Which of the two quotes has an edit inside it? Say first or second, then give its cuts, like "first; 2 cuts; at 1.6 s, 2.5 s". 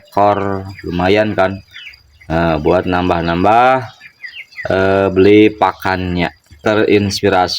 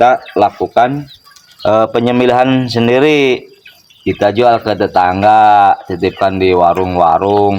first; 1 cut; at 6.6 s